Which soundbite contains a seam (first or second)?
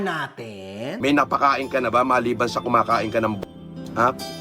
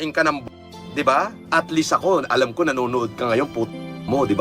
first